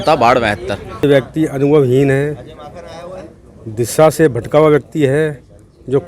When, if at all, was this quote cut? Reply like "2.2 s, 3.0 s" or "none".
1.0 s

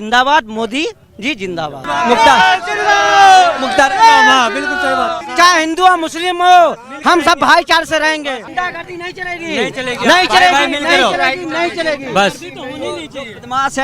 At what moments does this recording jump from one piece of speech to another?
1.9 s, 5.2 s, 8.5 s

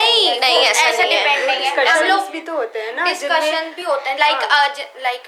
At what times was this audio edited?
none

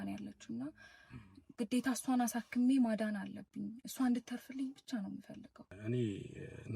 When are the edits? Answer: 5.7 s

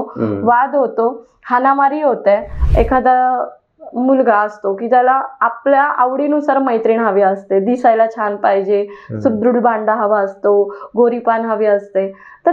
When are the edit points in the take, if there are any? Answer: 2.6 s

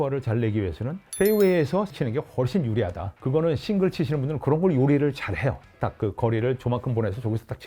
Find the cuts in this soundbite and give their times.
1.1 s, 1.9 s, 3.1 s

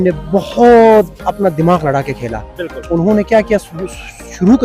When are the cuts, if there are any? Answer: none

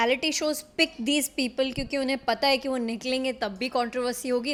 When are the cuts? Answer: none

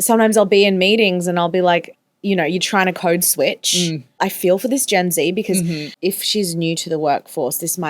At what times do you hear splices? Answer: 4.2 s, 5.9 s

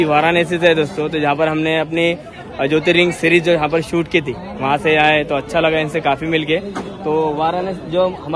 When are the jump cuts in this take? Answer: none

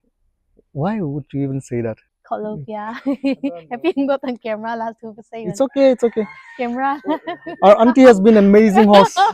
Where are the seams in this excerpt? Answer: 2.0 s

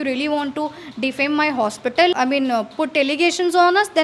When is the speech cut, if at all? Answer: 2.2 s

